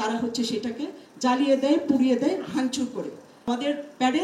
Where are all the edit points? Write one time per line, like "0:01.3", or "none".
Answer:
0:03.3